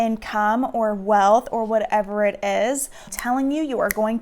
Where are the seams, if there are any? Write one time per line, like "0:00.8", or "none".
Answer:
0:03.0